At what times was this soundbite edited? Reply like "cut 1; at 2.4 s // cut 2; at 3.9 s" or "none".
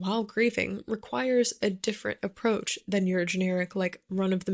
none